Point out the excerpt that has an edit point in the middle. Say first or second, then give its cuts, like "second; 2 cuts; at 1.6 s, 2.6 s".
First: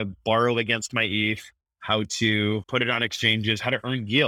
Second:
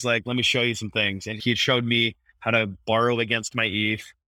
second; 1 cut; at 1.4 s